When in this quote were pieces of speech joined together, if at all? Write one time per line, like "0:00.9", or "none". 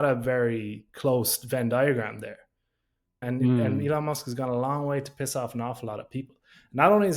0:03.2